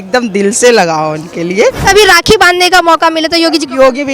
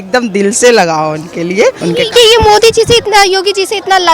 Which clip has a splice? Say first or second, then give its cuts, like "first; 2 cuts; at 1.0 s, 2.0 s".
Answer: first; 1 cut; at 1.8 s